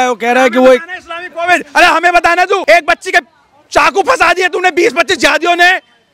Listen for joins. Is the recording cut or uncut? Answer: cut